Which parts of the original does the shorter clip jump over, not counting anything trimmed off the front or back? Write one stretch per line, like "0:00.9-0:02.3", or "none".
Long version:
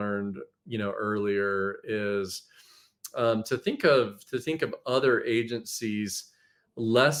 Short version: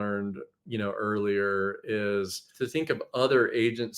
0:02.5-0:04.2